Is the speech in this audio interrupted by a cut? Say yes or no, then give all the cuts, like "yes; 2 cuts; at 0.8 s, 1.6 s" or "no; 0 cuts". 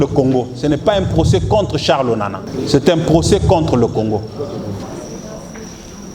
yes; 2 cuts; at 2.4 s, 4.9 s